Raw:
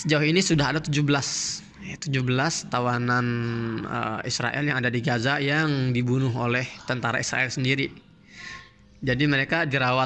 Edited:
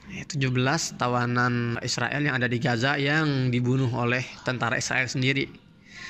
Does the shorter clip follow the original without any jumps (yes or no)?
no